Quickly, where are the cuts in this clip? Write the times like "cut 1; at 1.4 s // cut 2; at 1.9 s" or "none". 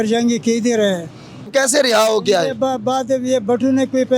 cut 1; at 1.5 s